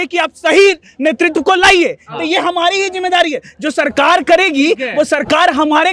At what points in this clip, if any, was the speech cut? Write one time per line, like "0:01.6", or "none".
none